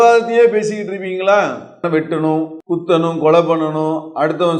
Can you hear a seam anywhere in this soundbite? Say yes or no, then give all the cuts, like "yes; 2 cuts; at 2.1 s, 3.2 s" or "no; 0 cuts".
yes; 2 cuts; at 1.8 s, 2.6 s